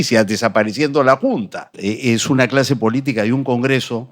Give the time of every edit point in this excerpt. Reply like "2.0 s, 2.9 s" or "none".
1.7 s